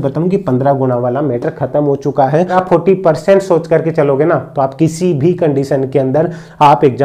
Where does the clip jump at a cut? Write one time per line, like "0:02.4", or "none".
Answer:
0:02.6